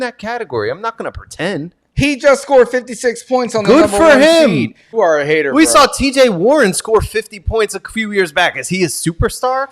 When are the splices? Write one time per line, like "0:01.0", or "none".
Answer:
0:04.9